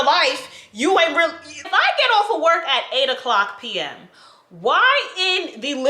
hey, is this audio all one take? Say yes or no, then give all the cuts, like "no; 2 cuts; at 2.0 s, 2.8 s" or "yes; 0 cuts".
no; 1 cut; at 1.6 s